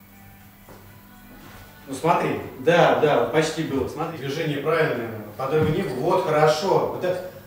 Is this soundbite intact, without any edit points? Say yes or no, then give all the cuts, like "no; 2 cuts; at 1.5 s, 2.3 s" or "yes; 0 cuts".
no; 1 cut; at 4.0 s